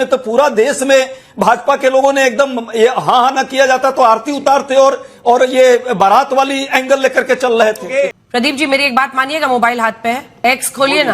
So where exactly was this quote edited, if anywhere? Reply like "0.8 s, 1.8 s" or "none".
8.1 s, 10.4 s